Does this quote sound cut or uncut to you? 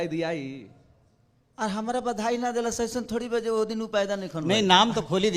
uncut